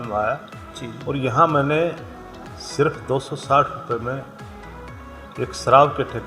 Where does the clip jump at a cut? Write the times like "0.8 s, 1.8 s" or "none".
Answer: none